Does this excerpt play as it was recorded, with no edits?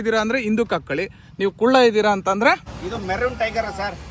no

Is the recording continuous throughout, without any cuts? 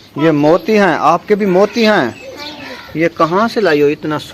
yes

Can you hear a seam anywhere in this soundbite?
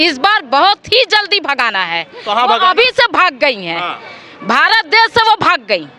no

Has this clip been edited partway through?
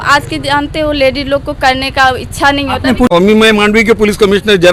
yes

